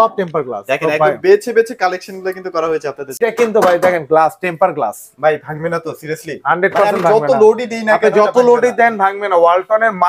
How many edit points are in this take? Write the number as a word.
one